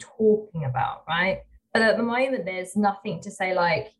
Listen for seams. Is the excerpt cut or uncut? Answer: cut